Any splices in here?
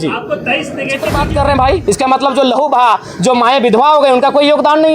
yes; 1 cut; at 1.1 s

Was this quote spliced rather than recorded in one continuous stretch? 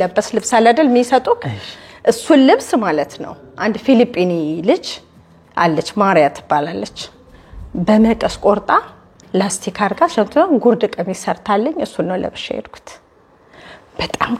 no; 0 cuts

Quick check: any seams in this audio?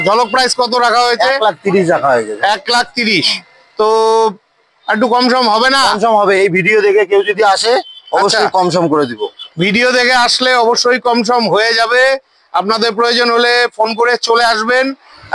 no; 0 cuts

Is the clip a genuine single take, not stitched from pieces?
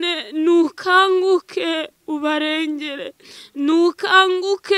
yes; 0 cuts

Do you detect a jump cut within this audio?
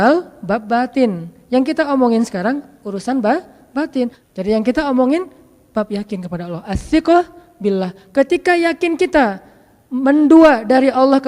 yes; 1 cut; at 4.2 s

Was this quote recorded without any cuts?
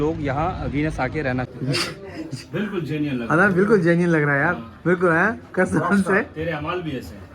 no; 1 cut; at 1.5 s

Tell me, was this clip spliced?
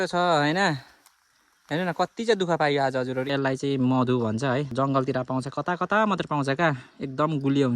yes; 2 cuts; at 3.3 s, 4.7 s

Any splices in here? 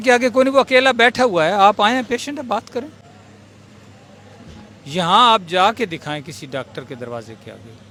no; 0 cuts

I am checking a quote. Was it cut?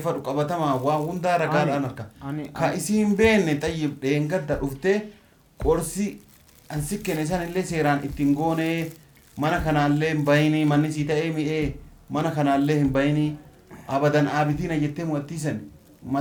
no; 0 cuts

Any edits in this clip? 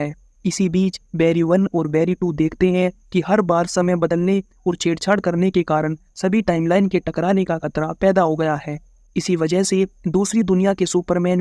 no; 0 cuts

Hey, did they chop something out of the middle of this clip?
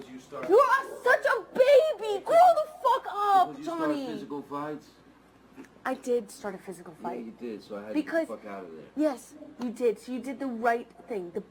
no; 0 cuts

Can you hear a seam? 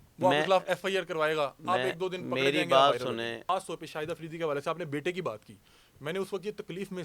yes; 1 cut; at 3.4 s

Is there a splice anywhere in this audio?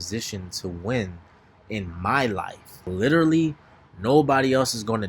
yes; 1 cut; at 2.8 s

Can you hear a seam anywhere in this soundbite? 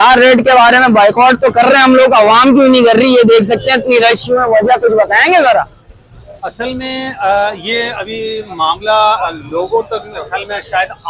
no; 0 cuts

